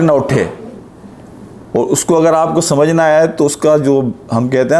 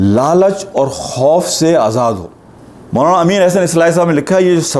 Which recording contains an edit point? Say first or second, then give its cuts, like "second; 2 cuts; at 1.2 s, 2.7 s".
second; 1 cut; at 2.2 s